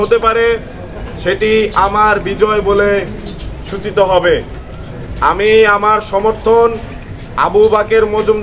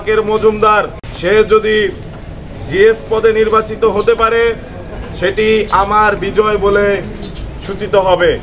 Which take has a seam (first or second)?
second